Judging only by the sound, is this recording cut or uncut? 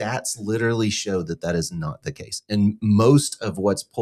uncut